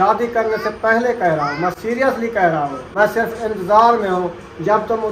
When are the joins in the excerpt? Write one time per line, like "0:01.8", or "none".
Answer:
0:02.8